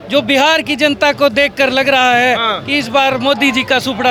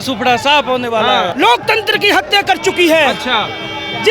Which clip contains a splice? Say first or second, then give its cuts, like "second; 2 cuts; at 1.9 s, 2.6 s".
second; 1 cut; at 1.3 s